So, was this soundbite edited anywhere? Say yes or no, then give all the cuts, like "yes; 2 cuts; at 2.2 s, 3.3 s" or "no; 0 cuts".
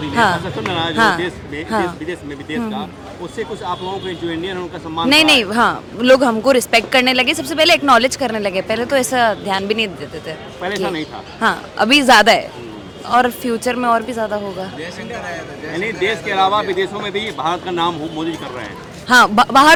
no; 0 cuts